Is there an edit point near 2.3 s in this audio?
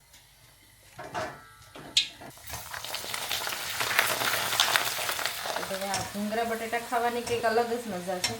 yes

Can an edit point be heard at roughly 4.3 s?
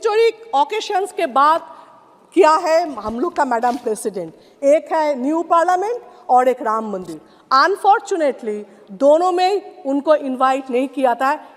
no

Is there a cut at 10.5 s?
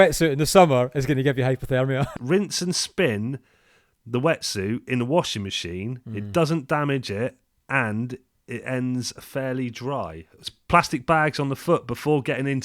yes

